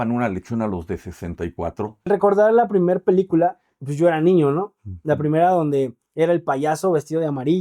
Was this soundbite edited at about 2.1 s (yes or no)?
yes